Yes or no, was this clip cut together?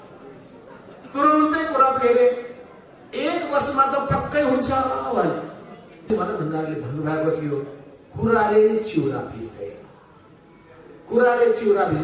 yes